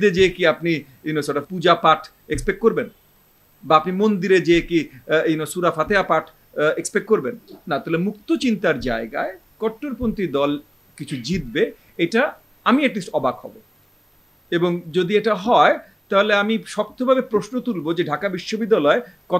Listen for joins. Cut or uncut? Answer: uncut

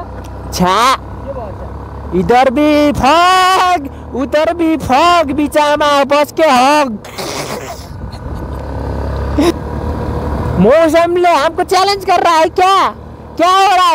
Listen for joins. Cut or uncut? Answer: cut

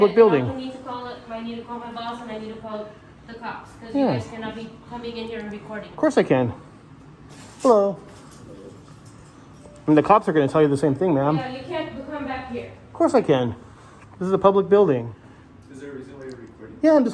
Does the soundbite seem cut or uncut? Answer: uncut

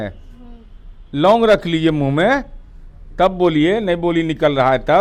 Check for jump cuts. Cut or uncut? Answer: uncut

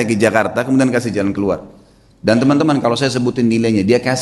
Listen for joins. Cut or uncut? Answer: uncut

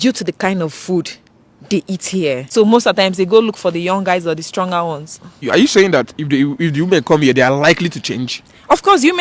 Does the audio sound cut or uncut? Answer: cut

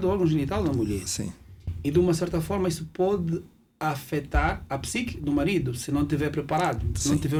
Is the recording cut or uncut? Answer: uncut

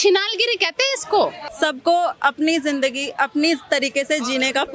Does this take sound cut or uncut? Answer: cut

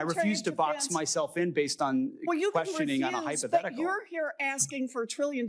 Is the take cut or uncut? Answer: uncut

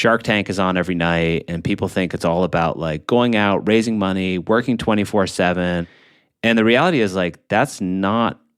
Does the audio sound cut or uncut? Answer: cut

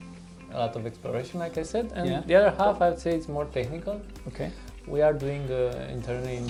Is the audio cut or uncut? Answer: uncut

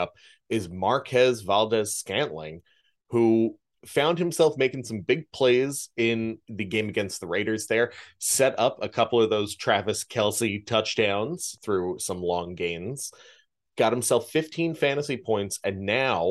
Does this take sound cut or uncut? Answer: cut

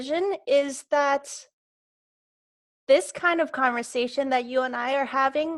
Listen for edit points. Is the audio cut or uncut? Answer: uncut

